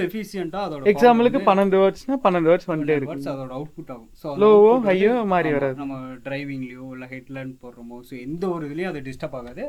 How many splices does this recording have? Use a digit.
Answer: 0